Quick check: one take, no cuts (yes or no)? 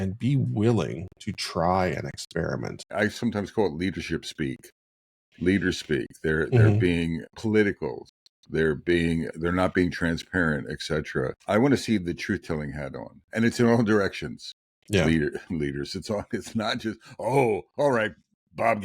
no